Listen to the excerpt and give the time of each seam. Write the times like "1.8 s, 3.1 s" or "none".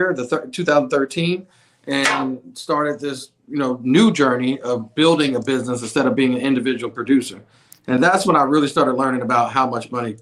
none